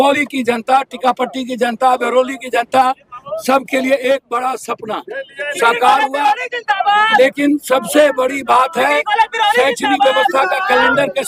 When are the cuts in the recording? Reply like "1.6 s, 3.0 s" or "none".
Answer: none